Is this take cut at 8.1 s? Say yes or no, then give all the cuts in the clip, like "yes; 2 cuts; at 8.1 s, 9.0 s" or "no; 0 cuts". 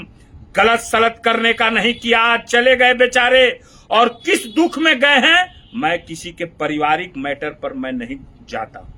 no; 0 cuts